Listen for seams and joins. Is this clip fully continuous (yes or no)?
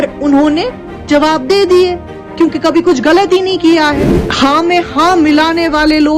no